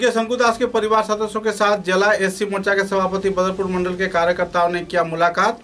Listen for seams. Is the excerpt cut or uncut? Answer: uncut